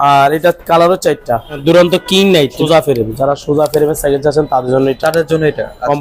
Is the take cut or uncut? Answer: cut